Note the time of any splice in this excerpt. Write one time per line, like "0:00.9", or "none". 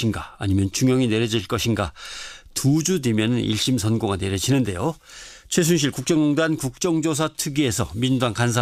none

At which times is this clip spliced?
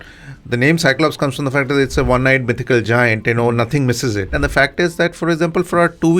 0:04.3

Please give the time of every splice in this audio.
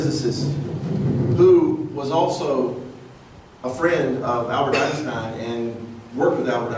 none

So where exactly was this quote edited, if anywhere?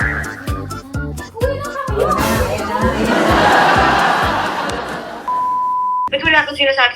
0:03.0
0:05.1
0:06.1

